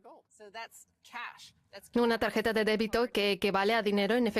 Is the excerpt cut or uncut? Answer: cut